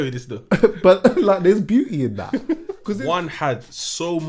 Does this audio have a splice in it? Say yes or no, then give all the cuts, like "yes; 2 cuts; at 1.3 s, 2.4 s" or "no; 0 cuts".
yes; 1 cut; at 2.8 s